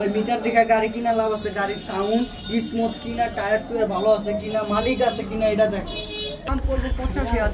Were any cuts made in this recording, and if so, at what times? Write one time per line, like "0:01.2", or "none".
0:06.4

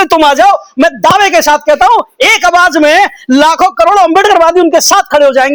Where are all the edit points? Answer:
none

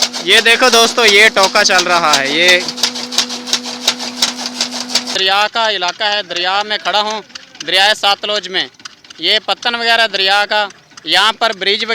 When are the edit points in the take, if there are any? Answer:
0:05.1

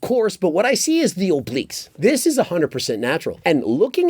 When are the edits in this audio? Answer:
0:01.8

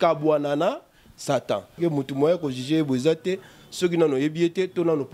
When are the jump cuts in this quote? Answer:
0:01.7

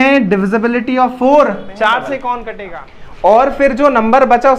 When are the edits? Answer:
0:02.5

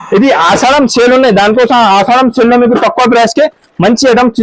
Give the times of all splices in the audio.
none

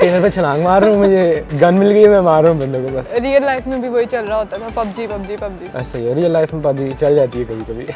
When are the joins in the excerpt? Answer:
none

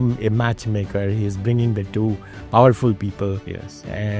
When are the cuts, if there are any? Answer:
none

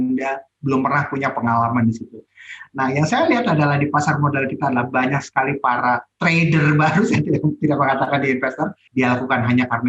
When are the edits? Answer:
0:08.8

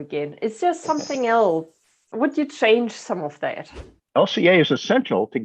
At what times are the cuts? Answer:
0:04.0

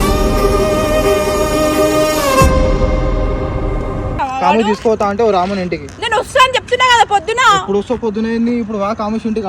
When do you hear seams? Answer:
0:04.1

